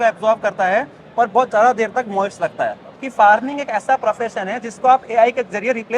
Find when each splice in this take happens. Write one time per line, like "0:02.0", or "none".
0:02.9